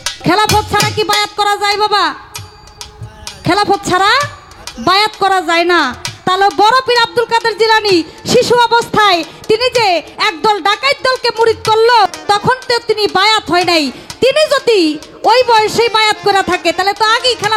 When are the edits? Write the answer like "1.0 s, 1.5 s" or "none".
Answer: 12.1 s